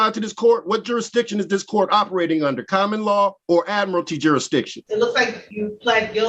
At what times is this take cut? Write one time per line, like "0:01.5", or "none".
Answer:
0:03.4
0:04.8
0:05.4